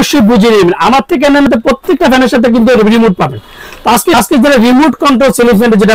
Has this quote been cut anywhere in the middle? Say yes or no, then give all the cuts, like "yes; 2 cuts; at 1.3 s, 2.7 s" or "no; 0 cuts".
yes; 2 cuts; at 1.5 s, 4.1 s